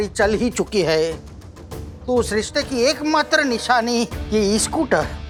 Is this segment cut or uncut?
uncut